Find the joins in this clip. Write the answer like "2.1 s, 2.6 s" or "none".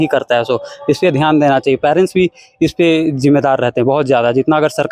none